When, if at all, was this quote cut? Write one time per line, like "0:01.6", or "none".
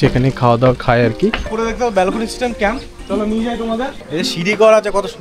0:01.4
0:04.0